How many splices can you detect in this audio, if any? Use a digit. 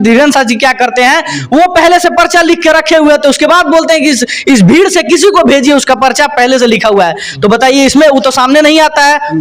0